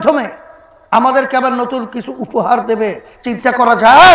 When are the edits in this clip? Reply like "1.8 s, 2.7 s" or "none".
none